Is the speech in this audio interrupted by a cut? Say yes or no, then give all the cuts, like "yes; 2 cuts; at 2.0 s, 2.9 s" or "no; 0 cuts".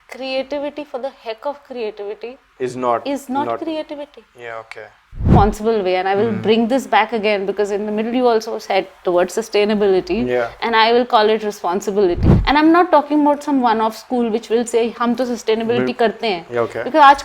yes; 2 cuts; at 5.3 s, 12.3 s